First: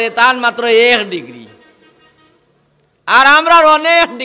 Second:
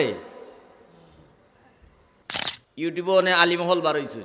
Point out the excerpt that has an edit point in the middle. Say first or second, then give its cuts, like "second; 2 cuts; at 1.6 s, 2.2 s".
second; 1 cut; at 2.3 s